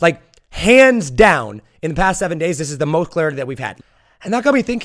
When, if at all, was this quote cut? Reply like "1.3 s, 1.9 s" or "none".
3.7 s